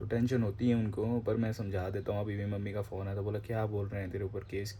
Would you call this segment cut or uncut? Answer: uncut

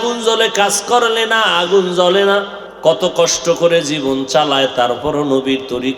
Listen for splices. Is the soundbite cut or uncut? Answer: cut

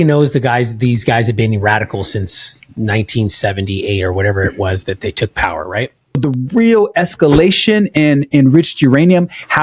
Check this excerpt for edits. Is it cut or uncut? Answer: cut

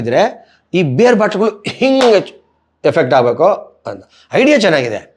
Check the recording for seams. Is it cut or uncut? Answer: uncut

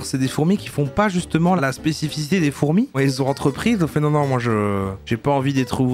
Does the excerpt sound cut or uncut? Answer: cut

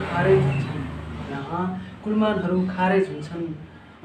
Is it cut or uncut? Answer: uncut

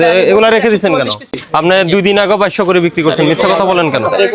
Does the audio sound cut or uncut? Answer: cut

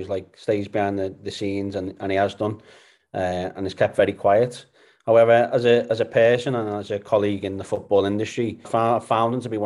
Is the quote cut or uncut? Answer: cut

